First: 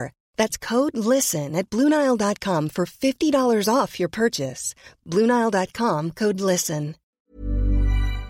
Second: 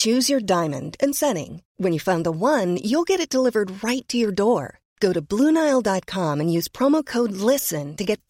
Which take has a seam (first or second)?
first